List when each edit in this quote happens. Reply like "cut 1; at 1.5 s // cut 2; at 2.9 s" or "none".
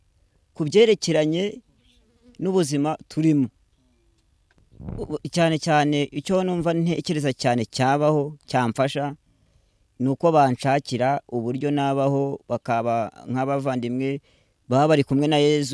cut 1; at 4.6 s